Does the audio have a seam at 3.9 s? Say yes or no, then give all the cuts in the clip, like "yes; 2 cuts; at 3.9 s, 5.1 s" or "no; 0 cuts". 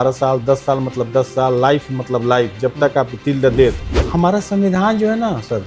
yes; 1 cut; at 3.9 s